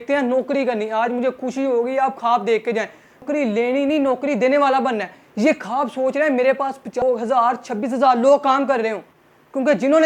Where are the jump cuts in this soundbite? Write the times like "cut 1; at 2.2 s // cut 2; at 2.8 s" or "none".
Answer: none